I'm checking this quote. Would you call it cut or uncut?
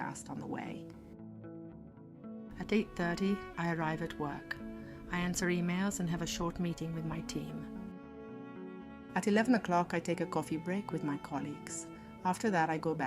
cut